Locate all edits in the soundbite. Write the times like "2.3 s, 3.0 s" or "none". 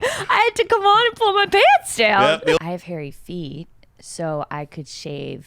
2.6 s